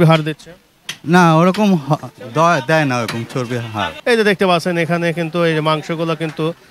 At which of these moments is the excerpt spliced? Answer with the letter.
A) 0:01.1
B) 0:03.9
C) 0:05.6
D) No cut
B